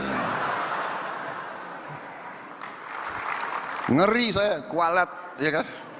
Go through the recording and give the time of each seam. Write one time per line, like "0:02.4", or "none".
0:03.0